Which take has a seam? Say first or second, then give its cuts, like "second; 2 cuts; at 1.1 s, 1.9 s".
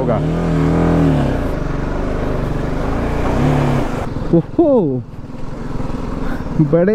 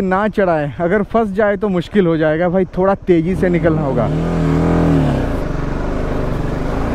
first; 1 cut; at 4.1 s